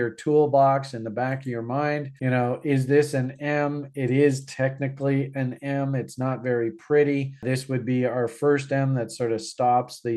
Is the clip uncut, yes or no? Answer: yes